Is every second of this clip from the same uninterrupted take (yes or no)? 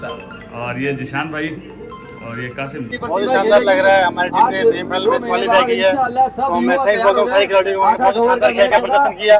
no